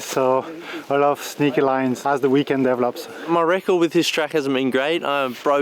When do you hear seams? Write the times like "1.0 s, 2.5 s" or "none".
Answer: 2.0 s, 3.1 s